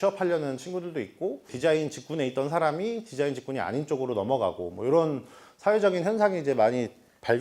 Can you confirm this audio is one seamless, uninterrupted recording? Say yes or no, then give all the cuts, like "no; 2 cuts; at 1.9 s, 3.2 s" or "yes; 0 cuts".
no; 1 cut; at 1.5 s